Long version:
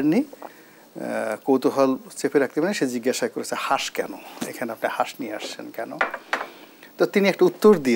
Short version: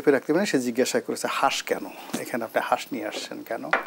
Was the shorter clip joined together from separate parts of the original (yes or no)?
no